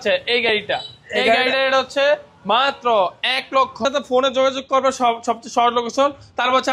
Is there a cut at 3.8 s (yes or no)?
yes